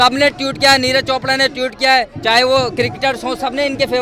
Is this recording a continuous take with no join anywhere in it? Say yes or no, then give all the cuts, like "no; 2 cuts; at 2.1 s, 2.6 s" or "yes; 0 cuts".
yes; 0 cuts